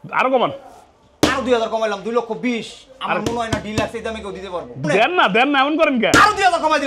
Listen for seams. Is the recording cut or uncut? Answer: cut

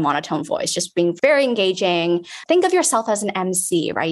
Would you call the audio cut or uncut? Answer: cut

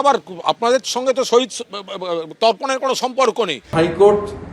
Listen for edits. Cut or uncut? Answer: cut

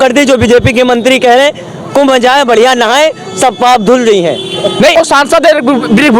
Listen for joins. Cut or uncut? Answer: cut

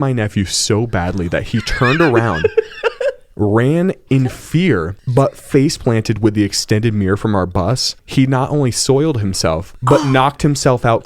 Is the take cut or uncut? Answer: cut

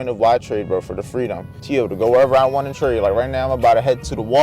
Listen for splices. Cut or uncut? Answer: cut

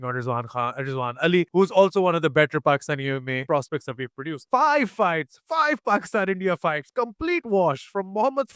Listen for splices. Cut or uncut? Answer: cut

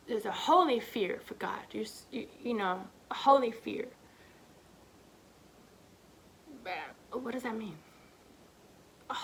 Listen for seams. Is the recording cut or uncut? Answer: uncut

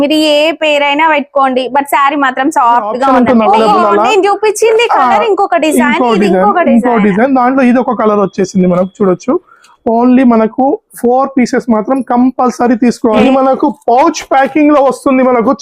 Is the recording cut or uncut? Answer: cut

